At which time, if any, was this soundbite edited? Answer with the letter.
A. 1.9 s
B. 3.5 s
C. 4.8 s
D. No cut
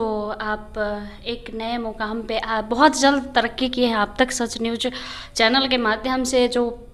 D